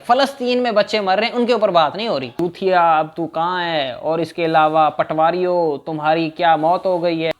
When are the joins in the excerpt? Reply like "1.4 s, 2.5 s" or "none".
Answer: 2.3 s